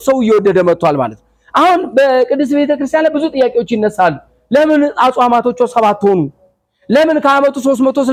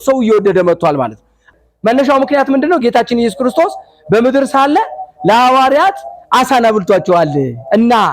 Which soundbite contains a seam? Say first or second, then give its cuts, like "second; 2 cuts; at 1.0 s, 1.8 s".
second; 1 cut; at 1.5 s